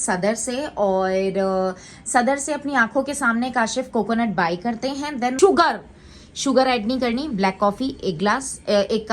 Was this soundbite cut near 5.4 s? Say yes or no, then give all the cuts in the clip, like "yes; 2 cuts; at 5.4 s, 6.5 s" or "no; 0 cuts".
yes; 1 cut; at 5.4 s